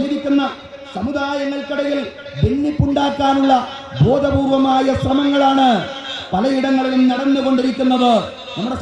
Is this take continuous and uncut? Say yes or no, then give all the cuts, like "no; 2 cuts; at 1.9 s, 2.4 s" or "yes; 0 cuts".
yes; 0 cuts